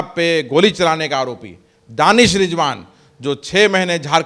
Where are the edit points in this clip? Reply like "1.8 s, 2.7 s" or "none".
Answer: none